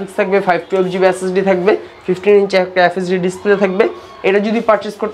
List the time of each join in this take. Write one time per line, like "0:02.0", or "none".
none